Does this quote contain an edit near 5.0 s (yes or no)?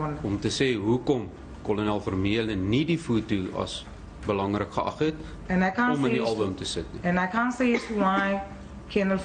yes